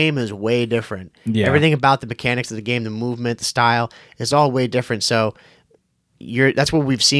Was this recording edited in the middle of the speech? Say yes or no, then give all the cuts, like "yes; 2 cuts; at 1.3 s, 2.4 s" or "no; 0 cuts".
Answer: no; 0 cuts